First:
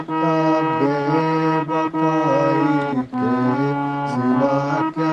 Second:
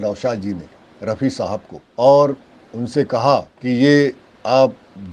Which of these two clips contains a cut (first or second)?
second